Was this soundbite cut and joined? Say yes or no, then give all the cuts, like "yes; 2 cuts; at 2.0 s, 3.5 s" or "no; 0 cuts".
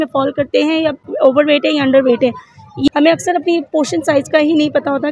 yes; 2 cuts; at 1.1 s, 2.9 s